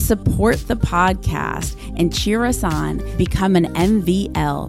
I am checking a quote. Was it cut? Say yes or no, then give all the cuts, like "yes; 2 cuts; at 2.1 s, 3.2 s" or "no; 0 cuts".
no; 0 cuts